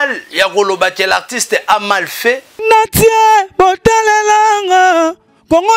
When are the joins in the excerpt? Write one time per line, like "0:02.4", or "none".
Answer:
0:02.5